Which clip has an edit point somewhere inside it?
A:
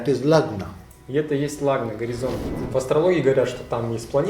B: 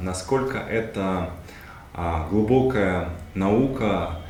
A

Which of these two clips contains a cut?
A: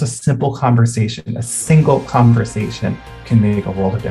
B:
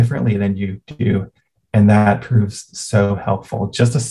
A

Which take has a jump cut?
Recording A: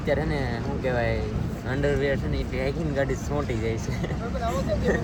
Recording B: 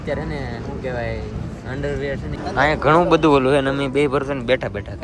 B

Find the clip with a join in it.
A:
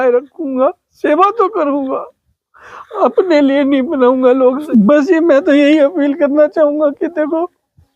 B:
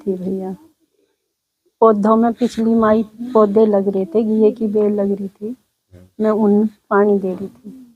A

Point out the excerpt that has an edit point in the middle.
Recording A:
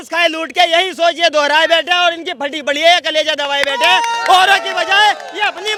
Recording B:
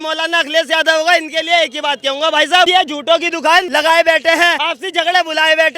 B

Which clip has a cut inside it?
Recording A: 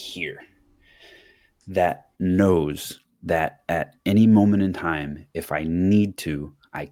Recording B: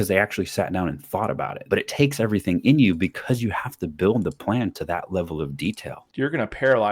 B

